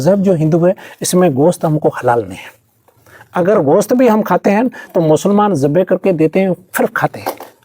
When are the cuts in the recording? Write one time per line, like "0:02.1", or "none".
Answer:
none